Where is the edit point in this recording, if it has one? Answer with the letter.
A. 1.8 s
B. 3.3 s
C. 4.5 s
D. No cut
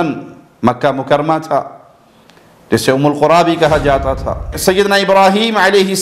C